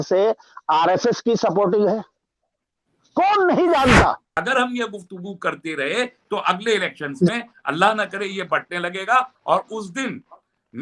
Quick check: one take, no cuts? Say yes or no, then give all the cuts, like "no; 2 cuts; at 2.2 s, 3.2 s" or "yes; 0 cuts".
no; 1 cut; at 4.3 s